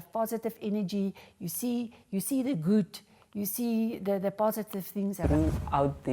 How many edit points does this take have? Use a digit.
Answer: 1